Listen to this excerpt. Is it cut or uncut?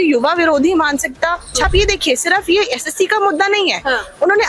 cut